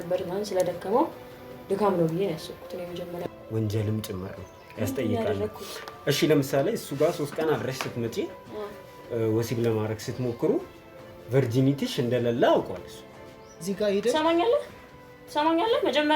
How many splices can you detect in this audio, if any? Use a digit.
2